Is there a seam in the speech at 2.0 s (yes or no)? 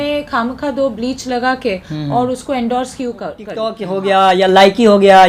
no